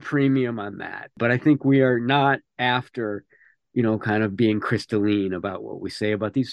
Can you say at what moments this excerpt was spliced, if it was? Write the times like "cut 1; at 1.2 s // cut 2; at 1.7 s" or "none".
cut 1; at 1.2 s